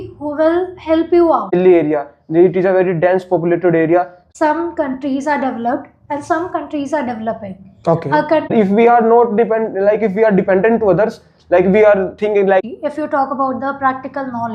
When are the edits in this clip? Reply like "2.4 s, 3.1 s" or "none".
1.5 s, 4.2 s, 8.5 s, 12.6 s